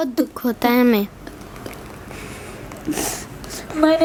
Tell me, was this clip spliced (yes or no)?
no